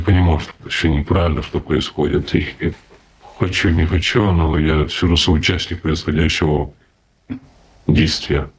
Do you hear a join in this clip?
no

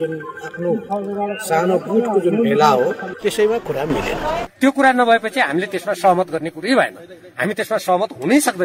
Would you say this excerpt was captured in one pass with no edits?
no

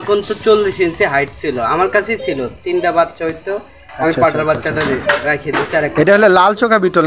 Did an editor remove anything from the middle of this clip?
no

